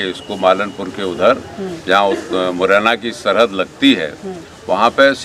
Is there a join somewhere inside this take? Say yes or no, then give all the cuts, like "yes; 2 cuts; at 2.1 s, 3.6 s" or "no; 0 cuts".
no; 0 cuts